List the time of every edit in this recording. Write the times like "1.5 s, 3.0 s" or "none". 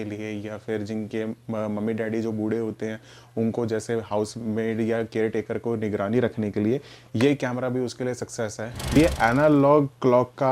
9.0 s